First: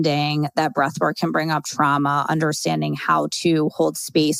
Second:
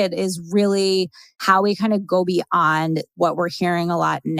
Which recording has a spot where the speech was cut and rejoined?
second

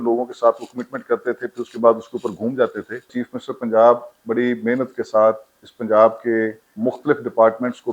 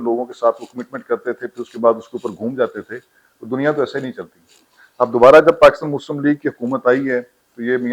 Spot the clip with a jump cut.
first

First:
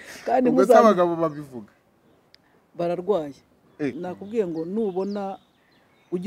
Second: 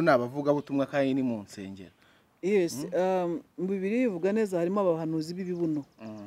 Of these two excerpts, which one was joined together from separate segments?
first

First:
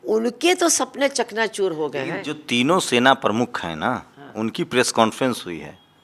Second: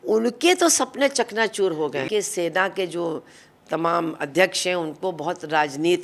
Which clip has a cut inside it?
second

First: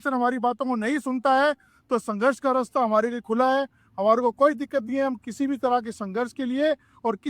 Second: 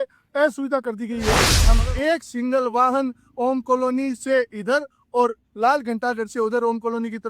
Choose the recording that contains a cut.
second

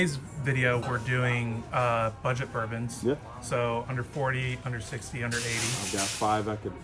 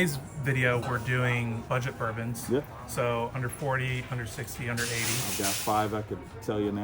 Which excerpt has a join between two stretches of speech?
second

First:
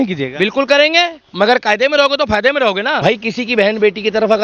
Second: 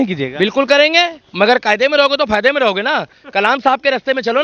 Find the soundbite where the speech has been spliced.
first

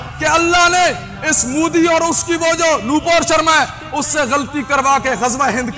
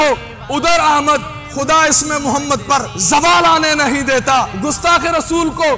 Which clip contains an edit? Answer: second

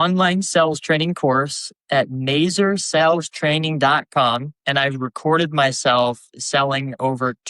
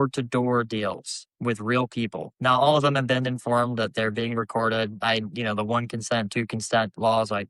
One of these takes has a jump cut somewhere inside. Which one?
first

